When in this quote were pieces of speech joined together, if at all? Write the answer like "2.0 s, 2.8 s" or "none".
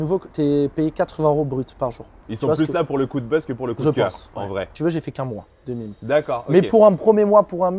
2.2 s, 4.7 s